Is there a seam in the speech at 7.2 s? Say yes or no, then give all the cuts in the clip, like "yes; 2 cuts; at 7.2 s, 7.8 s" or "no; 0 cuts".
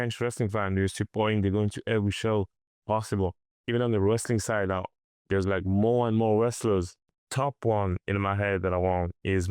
yes; 2 cuts; at 3.5 s, 7.2 s